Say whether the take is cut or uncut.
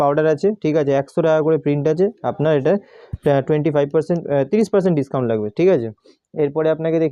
uncut